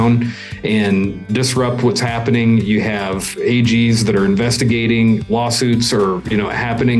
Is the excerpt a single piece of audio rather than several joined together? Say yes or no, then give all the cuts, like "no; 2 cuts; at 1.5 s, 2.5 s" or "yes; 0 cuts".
yes; 0 cuts